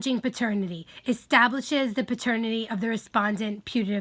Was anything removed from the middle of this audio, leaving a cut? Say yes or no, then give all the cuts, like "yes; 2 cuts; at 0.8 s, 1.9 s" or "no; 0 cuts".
no; 0 cuts